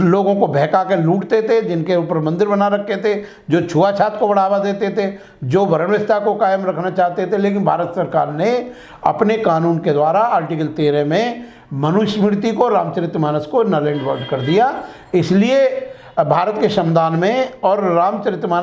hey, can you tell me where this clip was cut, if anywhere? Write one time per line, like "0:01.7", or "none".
none